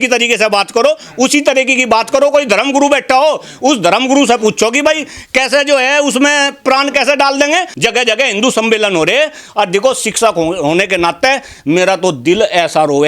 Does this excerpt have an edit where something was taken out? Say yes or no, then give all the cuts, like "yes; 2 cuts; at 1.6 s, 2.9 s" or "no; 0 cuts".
yes; 1 cut; at 7.7 s